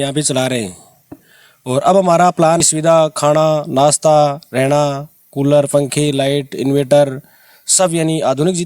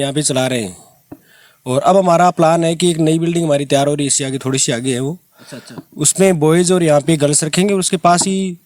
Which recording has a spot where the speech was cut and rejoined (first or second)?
first